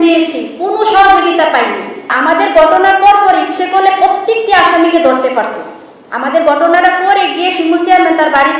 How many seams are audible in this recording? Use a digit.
1